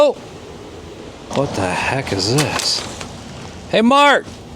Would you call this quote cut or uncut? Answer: cut